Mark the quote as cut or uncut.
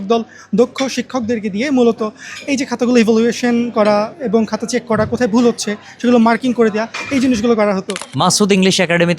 cut